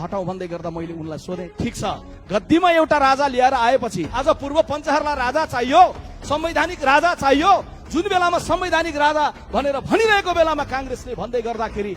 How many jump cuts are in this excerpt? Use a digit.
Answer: 1